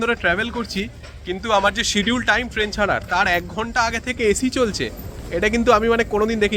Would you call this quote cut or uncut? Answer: uncut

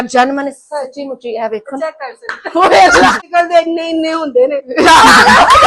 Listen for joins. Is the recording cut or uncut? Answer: cut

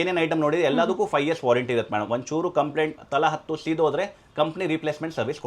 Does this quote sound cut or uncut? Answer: uncut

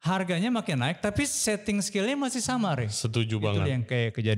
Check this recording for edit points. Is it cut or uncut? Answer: uncut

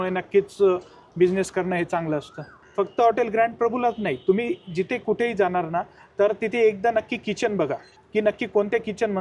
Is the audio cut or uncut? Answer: cut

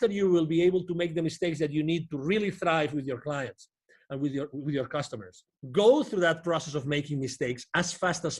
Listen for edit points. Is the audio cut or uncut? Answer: cut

